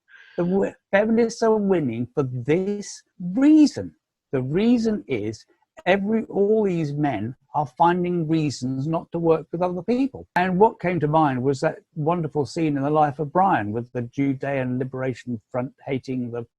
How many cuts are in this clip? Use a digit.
1